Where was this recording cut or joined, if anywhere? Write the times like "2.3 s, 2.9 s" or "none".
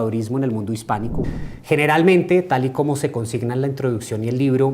1.2 s